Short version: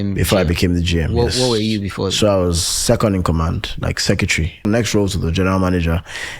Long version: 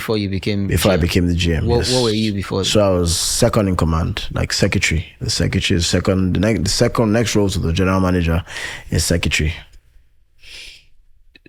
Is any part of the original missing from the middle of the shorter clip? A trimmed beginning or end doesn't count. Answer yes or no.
yes